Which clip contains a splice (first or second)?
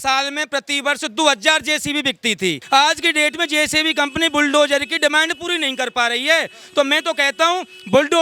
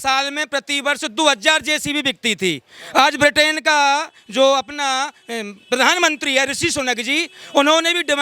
first